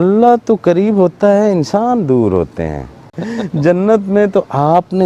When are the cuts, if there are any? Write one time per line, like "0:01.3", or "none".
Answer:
0:03.1